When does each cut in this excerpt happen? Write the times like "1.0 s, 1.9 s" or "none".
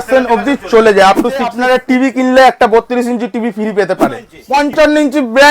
1.6 s, 4.3 s